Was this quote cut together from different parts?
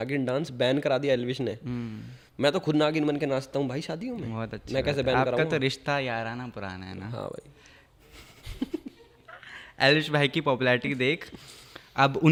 no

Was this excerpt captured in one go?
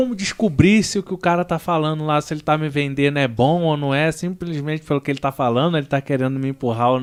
yes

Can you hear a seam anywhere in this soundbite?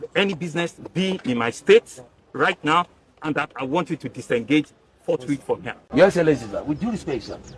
yes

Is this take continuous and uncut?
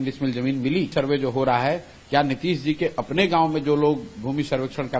no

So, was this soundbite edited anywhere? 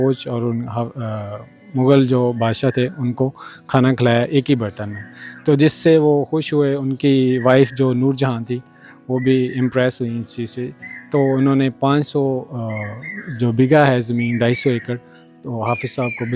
no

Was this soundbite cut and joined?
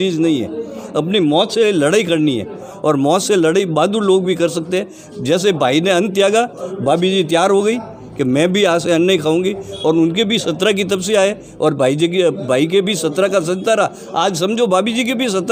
no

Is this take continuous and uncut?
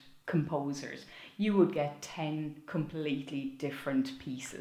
yes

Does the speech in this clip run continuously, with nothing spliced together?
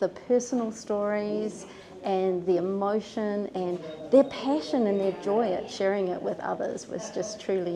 yes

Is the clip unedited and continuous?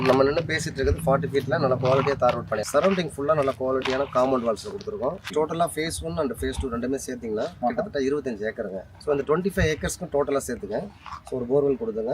no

